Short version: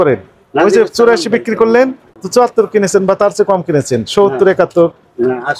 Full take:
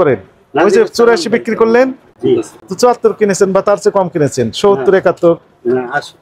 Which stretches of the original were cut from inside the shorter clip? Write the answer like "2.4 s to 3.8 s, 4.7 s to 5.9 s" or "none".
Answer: 2.1 s to 2.5 s